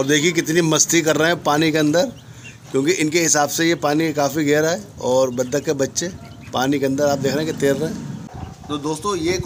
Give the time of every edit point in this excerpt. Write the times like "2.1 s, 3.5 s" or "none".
8.2 s